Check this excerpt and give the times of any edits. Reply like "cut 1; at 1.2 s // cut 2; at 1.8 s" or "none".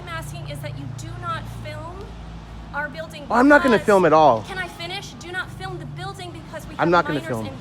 none